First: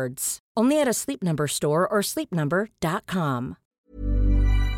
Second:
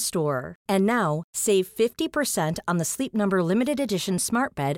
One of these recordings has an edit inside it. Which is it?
first; 1 cut; at 3.6 s

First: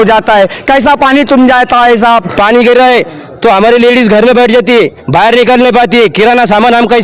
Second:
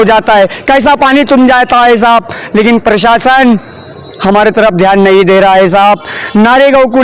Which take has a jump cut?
first; 1 cut; at 2.3 s

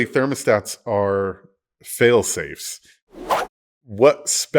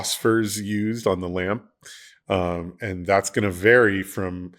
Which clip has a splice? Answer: first; 1 cut; at 3.2 s

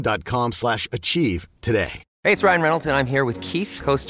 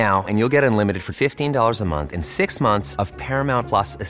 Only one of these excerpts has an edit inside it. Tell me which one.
first; 1 cut; at 2.0 s

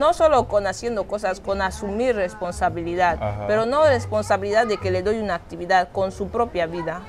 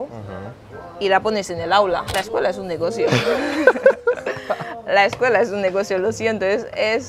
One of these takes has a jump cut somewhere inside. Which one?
second; 1 cut; at 2.1 s

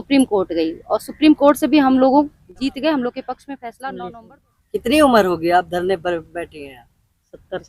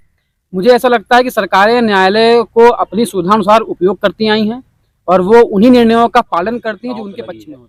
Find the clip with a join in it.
first; 1 cut; at 3.9 s

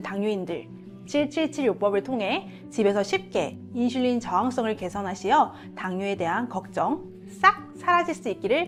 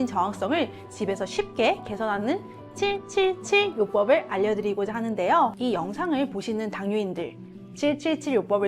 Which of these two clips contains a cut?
second; 1 cut; at 5.5 s

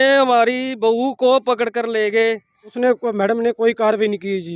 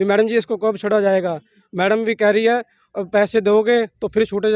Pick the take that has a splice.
first; 1 cut; at 2.7 s

